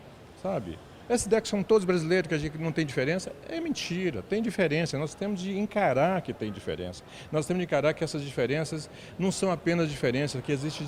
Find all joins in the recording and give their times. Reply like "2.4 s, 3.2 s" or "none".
none